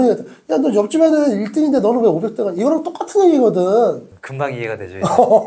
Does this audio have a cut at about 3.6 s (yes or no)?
no